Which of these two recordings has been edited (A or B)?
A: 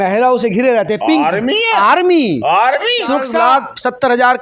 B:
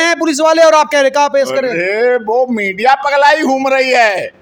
A